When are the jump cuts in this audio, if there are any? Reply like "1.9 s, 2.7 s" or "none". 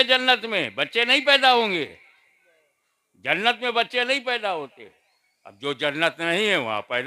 none